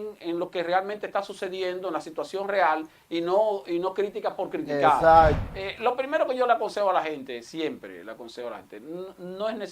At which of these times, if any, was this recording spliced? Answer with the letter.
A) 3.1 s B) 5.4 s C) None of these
B